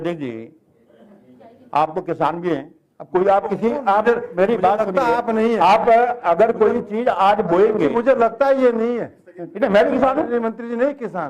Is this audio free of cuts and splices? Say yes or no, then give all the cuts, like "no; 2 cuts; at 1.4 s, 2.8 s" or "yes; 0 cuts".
yes; 0 cuts